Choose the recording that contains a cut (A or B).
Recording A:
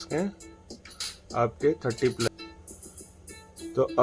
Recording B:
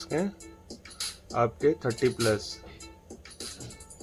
A